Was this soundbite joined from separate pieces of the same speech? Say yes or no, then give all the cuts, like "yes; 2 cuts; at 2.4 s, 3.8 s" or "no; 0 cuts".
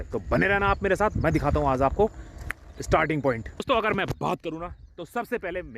yes; 1 cut; at 3.6 s